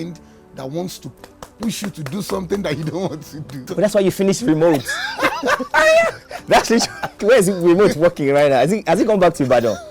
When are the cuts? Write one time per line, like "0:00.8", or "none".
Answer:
0:01.1
0:03.7
0:07.2